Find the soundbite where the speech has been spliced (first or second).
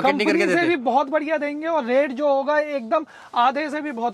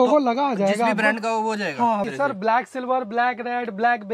second